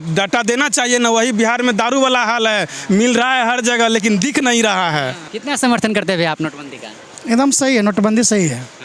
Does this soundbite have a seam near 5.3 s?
yes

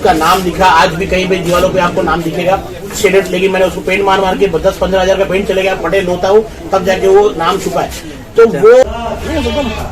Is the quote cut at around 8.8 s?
yes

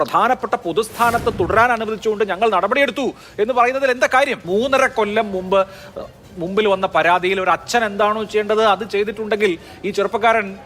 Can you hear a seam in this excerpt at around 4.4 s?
yes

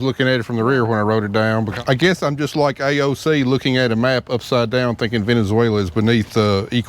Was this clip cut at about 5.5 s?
no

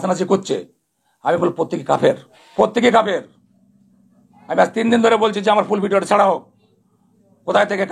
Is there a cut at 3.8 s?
no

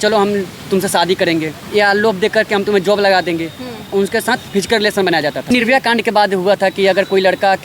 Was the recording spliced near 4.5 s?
yes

